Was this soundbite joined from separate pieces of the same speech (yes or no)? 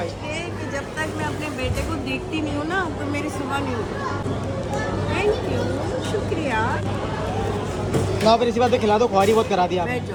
no